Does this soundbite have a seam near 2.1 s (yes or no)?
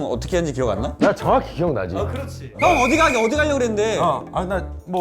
yes